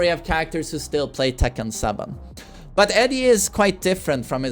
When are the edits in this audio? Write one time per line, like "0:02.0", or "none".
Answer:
none